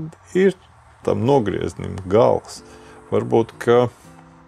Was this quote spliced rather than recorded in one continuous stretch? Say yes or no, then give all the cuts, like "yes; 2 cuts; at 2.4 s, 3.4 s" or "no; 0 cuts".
no; 0 cuts